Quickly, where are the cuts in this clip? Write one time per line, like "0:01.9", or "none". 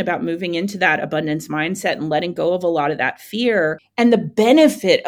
0:03.8